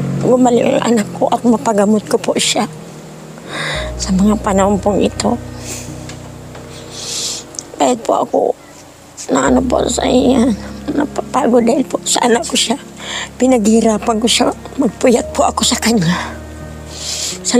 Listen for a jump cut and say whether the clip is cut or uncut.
uncut